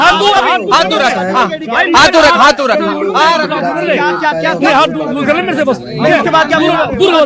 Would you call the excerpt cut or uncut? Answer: uncut